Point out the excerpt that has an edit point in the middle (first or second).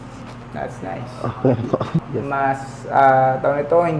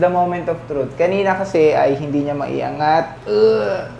first